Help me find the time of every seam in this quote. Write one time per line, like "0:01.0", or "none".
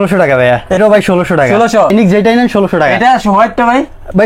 0:00.8
0:01.9